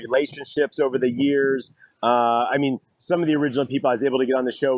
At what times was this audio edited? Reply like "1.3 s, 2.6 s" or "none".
none